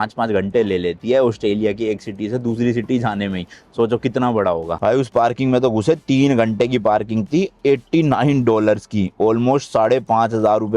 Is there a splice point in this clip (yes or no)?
yes